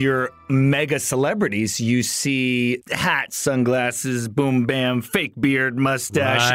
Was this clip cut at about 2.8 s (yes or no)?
yes